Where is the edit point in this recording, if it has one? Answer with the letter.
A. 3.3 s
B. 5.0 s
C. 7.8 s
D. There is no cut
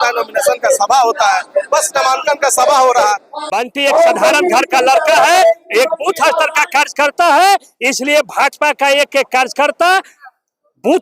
A